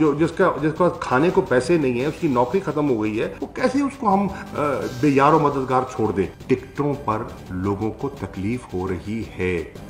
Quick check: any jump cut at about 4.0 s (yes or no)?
no